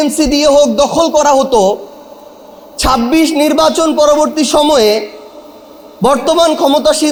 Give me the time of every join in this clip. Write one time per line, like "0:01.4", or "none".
none

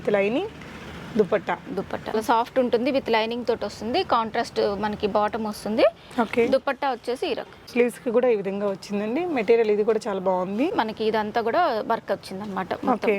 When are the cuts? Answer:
0:02.1
0:06.0
0:07.7
0:10.7

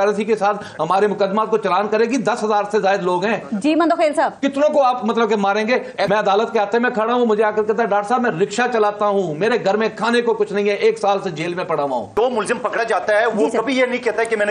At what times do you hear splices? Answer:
0:06.1
0:12.2

